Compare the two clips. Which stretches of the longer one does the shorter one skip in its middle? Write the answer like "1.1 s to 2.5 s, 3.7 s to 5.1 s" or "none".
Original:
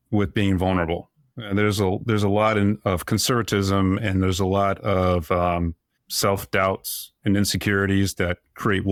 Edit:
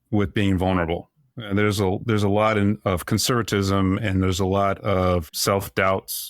5.2 s to 6.0 s